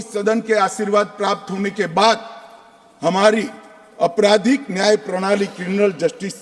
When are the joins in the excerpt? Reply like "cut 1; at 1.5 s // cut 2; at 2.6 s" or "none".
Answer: none